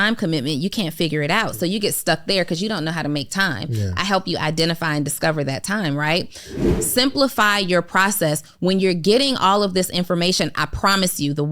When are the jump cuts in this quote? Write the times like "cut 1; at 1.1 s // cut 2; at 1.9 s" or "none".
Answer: cut 1; at 6.6 s